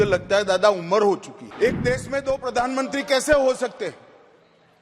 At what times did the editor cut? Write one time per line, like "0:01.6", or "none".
0:01.4